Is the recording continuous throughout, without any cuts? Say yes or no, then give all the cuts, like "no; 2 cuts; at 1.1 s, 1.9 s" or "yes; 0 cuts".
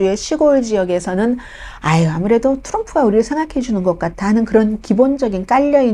yes; 0 cuts